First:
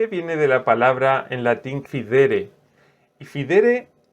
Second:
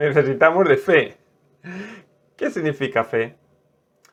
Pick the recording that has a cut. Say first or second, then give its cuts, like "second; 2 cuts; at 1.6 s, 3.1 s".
first; 1 cut; at 1.8 s